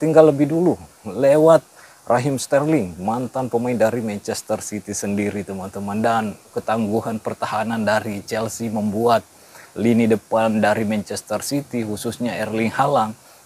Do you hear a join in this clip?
yes; 1 cut; at 6.6 s

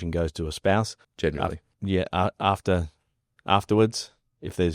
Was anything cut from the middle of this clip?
yes; 1 cut; at 1.0 s

